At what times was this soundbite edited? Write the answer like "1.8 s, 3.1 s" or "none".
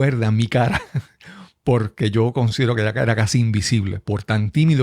none